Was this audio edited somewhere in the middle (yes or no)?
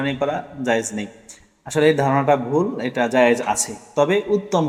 no